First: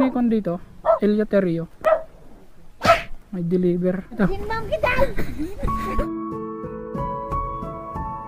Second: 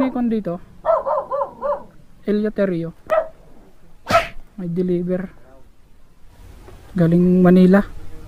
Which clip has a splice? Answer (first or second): first